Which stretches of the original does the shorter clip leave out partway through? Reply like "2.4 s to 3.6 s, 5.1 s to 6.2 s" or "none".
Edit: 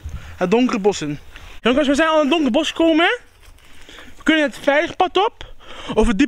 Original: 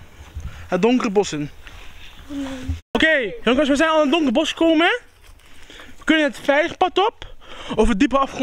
1.8 s to 3.3 s